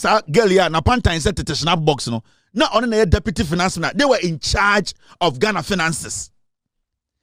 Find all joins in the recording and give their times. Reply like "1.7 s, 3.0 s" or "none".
none